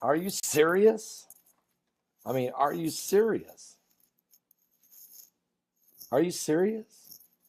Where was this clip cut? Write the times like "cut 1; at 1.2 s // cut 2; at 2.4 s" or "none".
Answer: cut 1; at 2.2 s